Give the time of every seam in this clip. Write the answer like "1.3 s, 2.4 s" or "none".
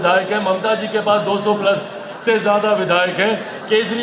none